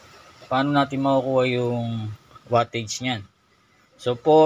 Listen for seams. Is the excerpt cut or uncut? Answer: uncut